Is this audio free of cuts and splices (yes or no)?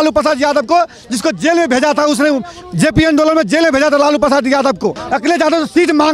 no